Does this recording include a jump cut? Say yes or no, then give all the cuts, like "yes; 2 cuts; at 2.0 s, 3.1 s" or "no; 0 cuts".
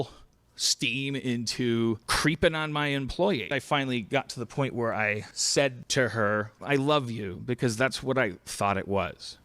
yes; 1 cut; at 3.5 s